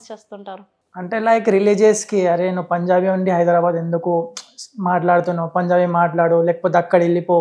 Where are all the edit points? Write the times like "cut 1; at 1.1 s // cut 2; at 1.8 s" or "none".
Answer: none